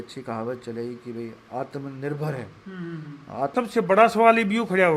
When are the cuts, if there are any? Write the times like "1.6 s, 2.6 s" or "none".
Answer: 3.5 s